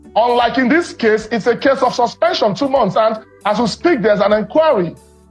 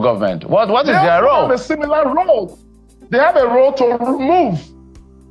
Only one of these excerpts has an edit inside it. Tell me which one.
second; 1 cut; at 1.2 s

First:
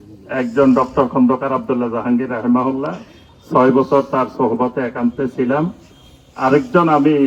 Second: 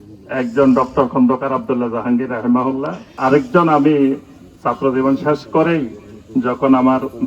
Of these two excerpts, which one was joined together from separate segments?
second; 1 cut; at 3.0 s

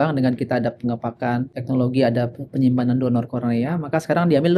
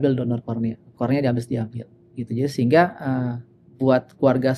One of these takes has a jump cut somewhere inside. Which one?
first; 1 cut; at 1.6 s

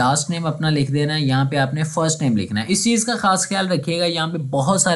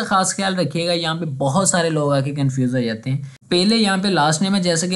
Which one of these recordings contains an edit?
second; 1 cut; at 3.3 s

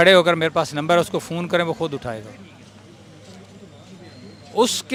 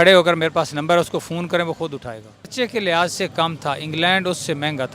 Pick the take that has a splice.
second; 1 cut; at 2.5 s

